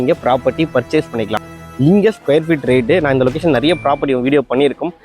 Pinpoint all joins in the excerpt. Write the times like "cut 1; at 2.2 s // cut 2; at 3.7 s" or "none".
cut 1; at 1.4 s